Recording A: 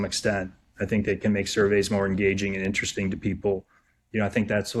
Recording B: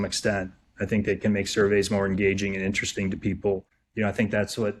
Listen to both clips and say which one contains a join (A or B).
B